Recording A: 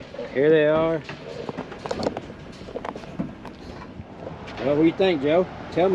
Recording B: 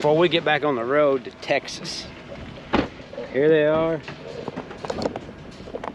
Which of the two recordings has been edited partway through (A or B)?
A